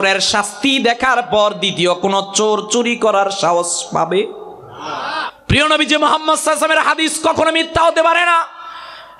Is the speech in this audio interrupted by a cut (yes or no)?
yes